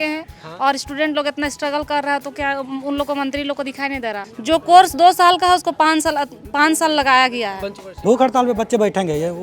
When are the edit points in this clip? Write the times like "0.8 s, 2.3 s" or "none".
4.2 s, 7.9 s